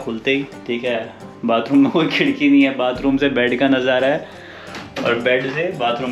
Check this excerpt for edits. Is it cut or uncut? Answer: uncut